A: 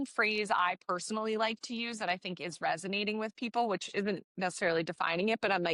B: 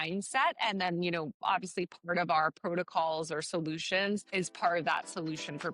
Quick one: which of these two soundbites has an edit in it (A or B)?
B